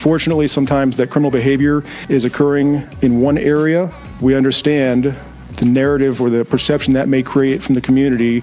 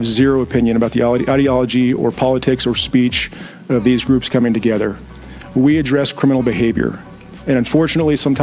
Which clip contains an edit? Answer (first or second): first